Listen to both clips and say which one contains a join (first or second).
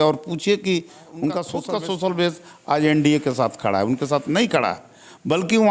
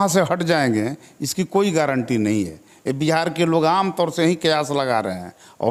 first